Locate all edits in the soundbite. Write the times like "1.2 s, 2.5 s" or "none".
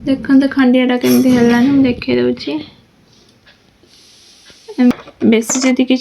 4.9 s